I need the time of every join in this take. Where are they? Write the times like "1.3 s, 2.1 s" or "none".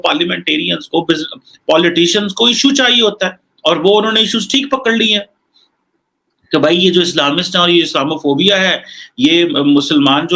none